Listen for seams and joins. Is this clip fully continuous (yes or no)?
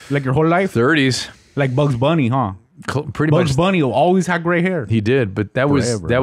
yes